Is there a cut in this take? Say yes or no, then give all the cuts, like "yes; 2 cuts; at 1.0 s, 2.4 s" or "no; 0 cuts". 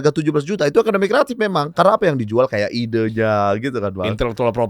yes; 1 cut; at 1.7 s